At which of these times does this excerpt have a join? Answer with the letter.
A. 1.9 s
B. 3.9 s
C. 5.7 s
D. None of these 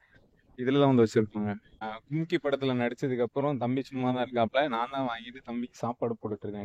A